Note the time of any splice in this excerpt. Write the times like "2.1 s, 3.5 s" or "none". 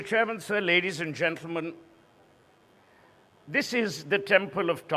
3.0 s